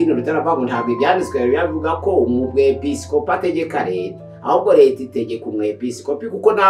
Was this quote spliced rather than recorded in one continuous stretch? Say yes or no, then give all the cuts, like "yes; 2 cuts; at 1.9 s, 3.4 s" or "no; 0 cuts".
no; 0 cuts